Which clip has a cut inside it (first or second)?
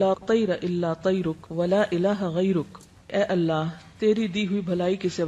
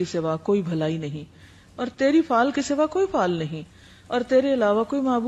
first